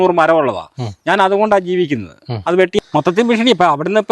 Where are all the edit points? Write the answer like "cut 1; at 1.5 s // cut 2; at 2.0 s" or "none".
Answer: cut 1; at 2.8 s